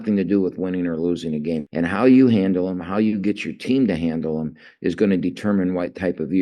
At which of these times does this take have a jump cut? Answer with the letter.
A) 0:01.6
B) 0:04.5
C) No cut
A